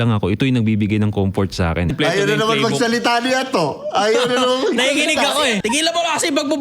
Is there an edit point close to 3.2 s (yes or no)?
no